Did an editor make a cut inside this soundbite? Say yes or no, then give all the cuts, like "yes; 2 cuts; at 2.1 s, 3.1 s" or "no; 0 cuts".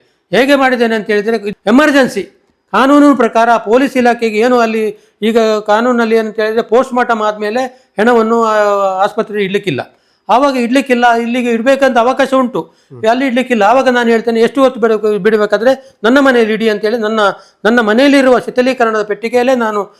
yes; 1 cut; at 1.5 s